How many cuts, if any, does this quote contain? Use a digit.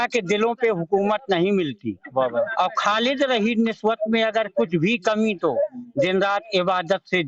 0